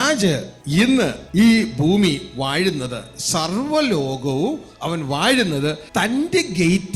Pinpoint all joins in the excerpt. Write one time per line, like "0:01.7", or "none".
0:00.9
0:05.8